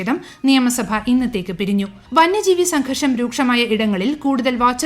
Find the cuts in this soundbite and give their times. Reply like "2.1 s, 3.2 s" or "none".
2.0 s